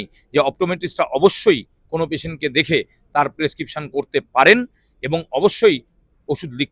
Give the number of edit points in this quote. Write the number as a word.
zero